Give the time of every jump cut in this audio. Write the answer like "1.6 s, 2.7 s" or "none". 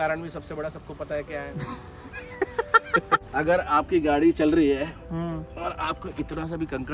3.2 s